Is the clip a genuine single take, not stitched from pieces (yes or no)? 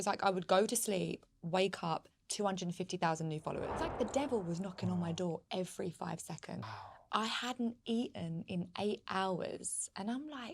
no